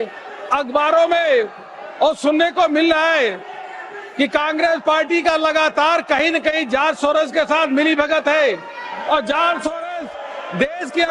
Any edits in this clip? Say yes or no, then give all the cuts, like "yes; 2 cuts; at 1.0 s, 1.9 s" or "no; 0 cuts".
no; 0 cuts